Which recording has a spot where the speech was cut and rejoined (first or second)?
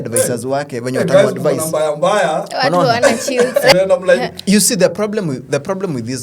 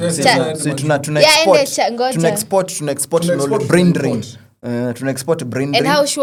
first